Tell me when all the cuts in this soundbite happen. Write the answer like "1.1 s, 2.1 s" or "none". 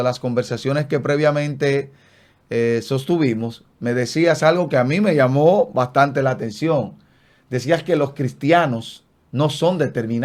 none